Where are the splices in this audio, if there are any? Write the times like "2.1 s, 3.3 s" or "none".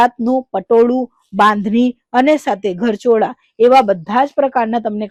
none